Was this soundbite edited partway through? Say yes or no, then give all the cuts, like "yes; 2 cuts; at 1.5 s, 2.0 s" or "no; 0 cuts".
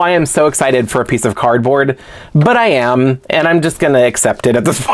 no; 0 cuts